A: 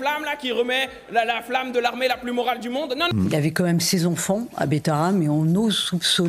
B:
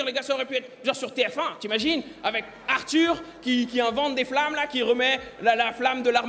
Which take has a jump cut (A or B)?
A